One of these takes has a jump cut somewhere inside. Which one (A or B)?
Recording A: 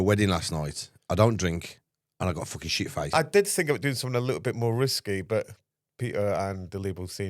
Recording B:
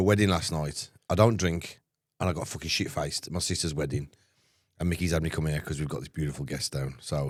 A